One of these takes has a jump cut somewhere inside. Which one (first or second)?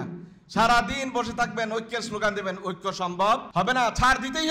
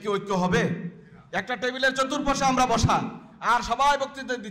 first